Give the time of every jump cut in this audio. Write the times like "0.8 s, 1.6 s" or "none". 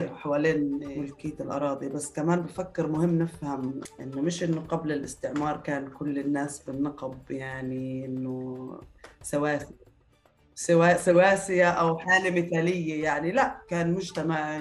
0.9 s, 3.8 s